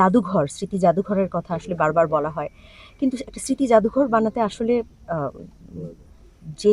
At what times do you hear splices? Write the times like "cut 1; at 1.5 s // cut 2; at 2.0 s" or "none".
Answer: none